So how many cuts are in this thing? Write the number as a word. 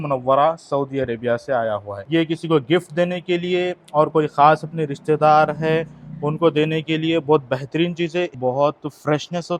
two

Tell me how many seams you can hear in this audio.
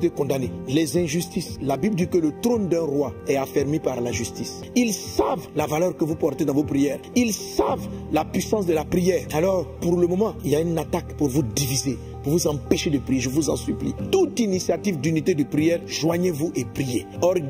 one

